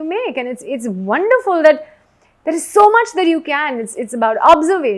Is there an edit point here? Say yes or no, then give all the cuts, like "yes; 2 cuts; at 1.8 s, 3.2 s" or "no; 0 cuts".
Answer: no; 0 cuts